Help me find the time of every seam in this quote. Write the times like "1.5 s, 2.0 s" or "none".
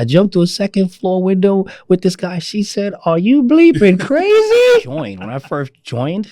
5.1 s